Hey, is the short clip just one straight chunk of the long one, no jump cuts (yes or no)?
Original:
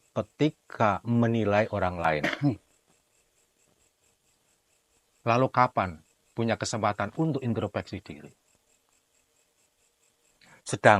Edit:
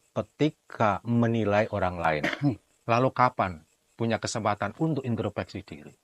no